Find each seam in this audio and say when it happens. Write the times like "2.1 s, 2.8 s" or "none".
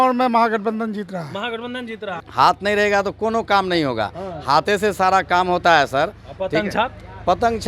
2.1 s